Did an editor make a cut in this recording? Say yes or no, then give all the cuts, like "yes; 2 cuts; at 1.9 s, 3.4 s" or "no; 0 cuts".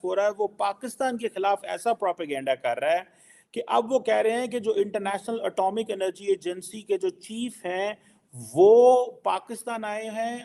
no; 0 cuts